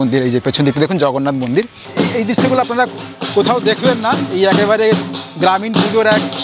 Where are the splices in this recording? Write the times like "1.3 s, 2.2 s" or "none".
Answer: 1.8 s

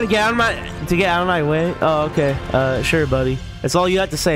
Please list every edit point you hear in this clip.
none

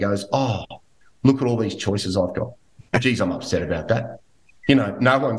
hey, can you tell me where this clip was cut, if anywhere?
none

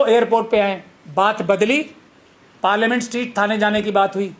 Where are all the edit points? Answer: 0.9 s

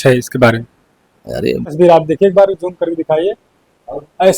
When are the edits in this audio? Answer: 1.7 s

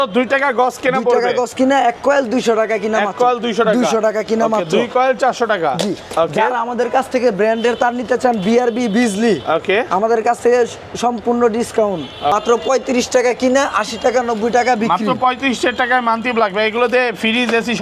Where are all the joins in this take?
none

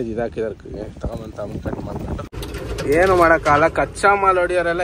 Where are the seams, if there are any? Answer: 2.3 s

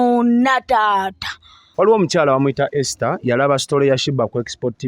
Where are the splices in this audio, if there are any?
1.6 s

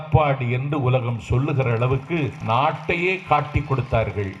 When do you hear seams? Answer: 2.4 s

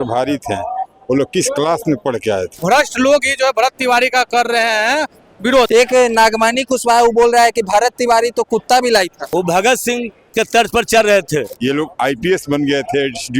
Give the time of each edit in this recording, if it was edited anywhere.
2.5 s, 5.7 s, 9.2 s, 11.5 s

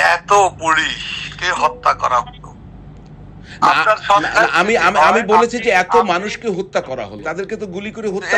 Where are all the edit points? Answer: 7.2 s

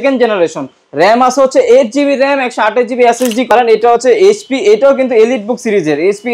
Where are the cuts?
3.5 s

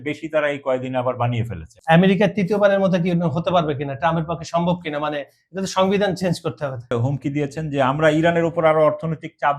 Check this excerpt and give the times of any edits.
1.7 s, 6.9 s

